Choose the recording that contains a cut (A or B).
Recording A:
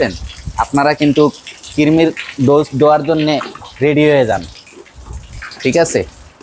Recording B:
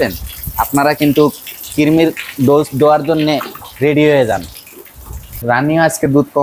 B